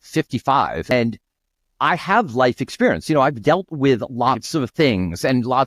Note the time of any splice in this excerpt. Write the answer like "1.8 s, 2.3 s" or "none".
0.9 s